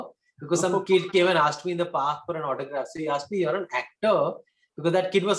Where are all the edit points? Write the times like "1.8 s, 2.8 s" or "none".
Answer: none